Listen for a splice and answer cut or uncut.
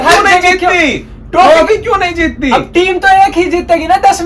uncut